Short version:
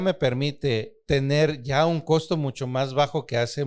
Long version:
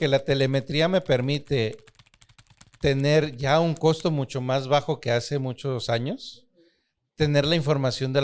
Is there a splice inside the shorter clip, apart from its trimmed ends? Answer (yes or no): yes